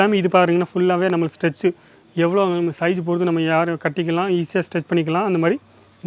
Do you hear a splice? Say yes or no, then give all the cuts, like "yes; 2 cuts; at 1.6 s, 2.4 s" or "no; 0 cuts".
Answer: no; 0 cuts